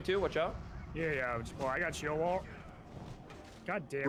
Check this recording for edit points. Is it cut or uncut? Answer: uncut